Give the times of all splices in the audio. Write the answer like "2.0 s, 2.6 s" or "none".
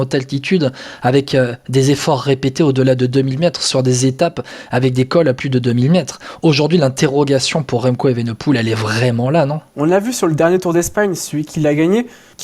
none